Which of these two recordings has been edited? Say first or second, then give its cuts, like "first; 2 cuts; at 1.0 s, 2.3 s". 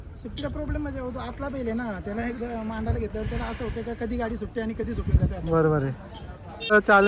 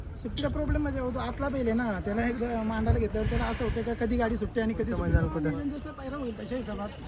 second; 1 cut; at 5.0 s